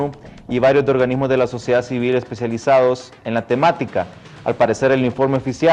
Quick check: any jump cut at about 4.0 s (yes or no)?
no